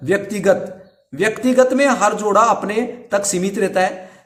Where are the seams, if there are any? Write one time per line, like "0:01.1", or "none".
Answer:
none